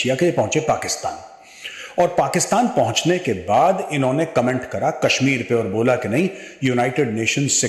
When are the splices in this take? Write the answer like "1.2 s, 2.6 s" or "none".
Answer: none